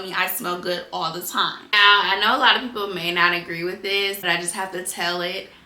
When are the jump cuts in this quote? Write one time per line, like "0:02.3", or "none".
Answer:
0:01.6
0:04.2